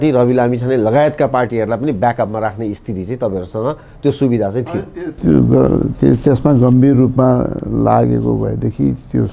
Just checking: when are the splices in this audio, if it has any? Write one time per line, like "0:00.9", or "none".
none